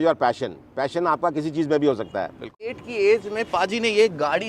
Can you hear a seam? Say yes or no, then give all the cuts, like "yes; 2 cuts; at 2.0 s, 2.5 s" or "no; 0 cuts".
yes; 1 cut; at 2.7 s